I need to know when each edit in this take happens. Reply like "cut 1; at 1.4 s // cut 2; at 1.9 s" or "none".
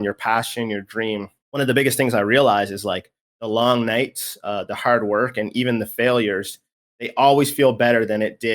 cut 1; at 1.4 s